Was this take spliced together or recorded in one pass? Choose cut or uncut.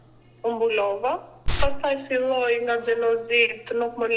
cut